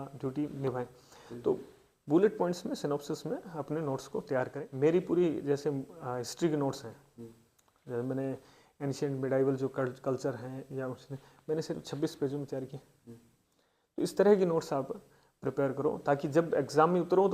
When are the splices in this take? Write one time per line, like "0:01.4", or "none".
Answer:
0:04.6